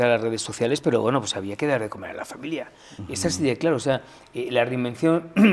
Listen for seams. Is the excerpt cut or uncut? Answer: uncut